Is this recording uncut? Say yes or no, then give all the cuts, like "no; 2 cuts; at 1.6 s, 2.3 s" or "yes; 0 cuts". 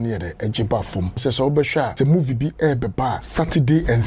no; 3 cuts; at 1.2 s, 1.9 s, 3.2 s